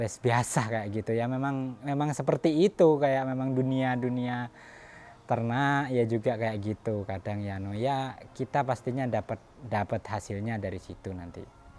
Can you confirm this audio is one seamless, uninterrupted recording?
yes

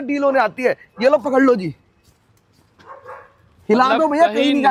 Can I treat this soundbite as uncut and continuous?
yes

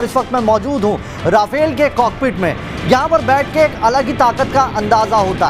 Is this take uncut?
yes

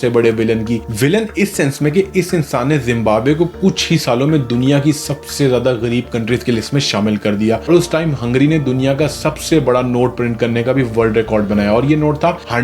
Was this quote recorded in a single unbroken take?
no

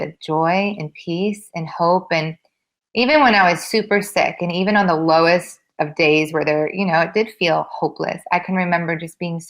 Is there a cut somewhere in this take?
no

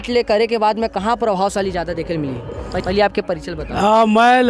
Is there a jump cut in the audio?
no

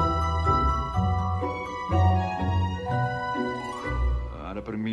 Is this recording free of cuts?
no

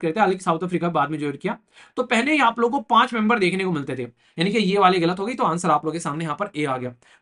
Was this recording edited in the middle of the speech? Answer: yes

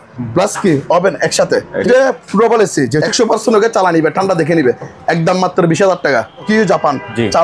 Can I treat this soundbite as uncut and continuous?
no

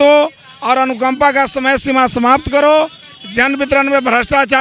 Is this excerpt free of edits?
yes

